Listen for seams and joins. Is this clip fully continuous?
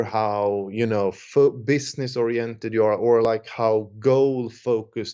yes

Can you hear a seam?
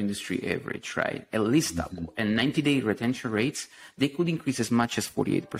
no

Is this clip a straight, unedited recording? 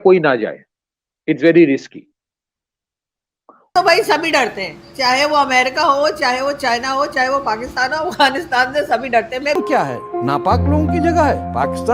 no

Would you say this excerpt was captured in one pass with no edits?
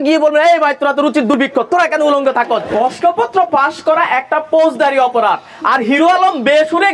no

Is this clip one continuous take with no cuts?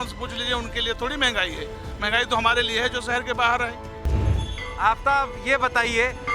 yes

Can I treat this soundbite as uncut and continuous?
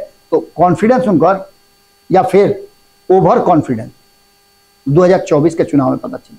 yes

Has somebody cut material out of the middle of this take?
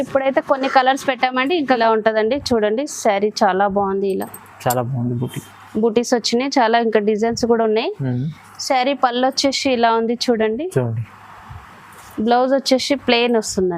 yes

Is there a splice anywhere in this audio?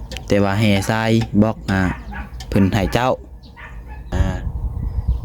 yes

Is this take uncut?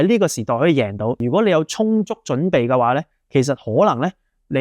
no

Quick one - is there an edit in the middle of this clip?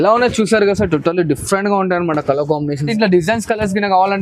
yes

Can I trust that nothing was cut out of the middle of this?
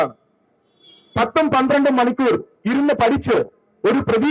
yes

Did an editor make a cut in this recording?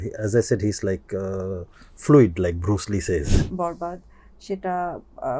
yes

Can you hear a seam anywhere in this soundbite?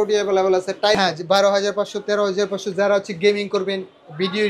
yes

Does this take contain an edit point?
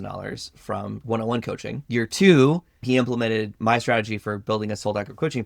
yes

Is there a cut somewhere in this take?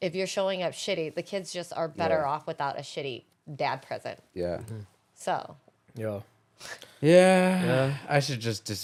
no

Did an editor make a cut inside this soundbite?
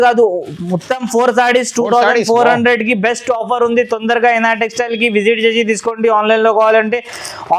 no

